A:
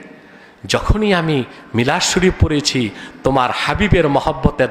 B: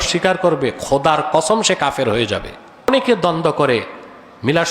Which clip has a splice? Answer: B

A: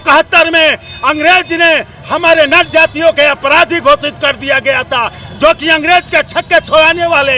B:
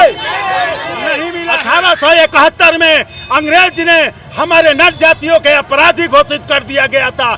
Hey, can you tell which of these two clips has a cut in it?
B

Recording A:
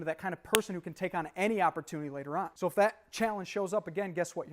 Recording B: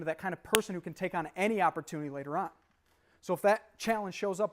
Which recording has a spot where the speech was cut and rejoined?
A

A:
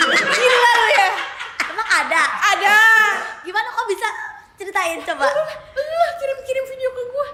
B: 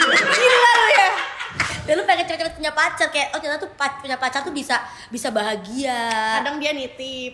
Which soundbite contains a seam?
B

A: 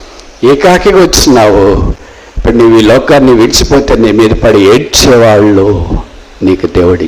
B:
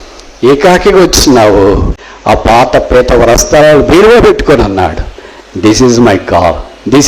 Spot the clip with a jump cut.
B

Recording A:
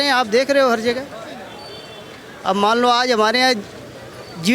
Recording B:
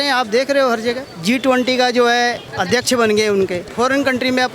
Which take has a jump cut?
B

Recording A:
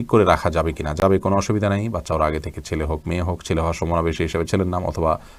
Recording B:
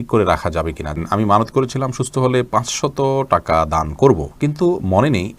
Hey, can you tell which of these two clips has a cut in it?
B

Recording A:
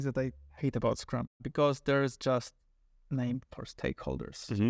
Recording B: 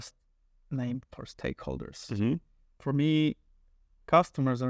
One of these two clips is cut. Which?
A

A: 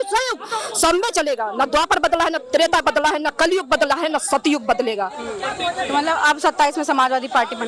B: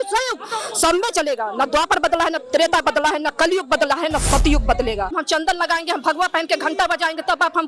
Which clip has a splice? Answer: B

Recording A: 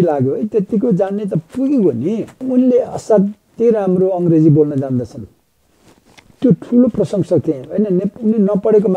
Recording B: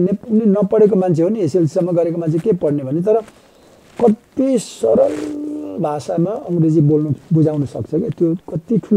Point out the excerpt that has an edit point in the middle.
A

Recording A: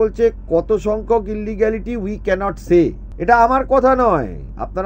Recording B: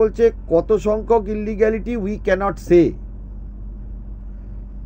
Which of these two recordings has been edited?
A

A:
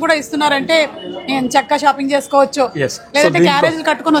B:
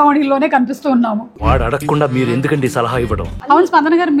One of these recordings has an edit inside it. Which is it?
B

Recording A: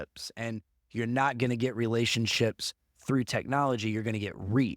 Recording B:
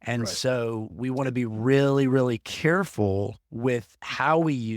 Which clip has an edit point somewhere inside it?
B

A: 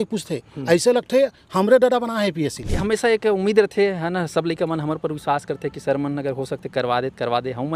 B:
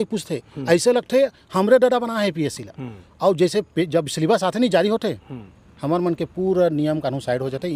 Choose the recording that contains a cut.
A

